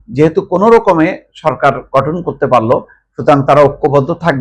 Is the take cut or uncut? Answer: uncut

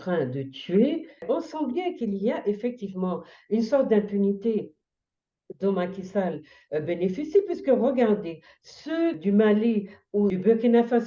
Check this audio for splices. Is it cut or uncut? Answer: cut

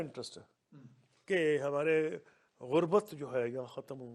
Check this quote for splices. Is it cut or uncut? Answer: uncut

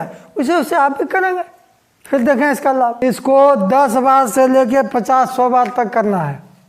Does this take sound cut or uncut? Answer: cut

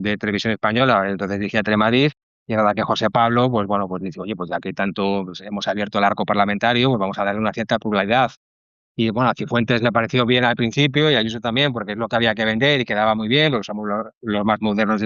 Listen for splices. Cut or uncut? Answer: uncut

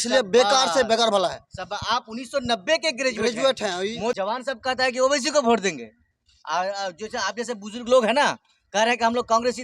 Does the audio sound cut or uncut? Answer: cut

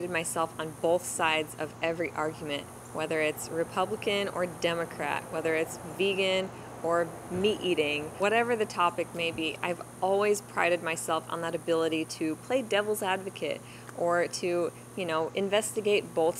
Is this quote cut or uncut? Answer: uncut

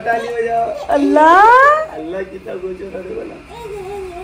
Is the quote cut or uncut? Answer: uncut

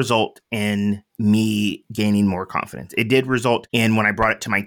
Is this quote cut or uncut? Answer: cut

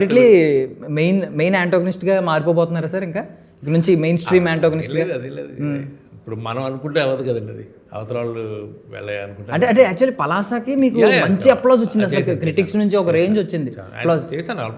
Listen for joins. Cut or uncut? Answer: uncut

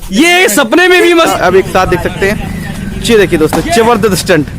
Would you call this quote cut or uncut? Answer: cut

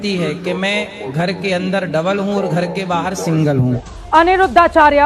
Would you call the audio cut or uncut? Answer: cut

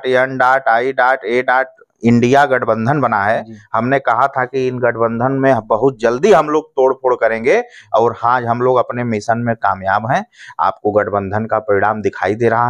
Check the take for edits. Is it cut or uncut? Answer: uncut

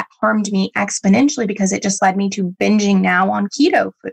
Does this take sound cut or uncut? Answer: uncut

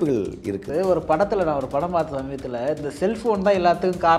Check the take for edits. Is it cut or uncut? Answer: uncut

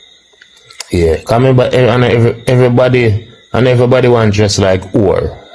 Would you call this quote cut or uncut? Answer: uncut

